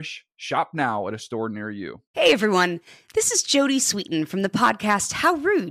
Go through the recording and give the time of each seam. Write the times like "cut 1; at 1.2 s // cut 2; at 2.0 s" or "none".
cut 1; at 2.0 s